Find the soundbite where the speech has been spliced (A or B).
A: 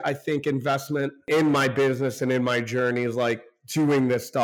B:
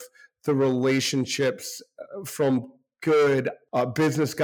A